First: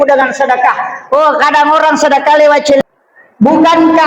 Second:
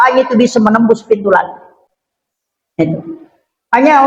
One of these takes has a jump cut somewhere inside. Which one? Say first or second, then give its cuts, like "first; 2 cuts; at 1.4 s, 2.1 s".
first; 1 cut; at 2.8 s